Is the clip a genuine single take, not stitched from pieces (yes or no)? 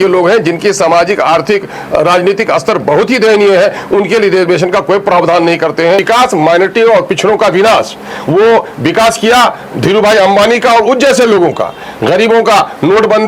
no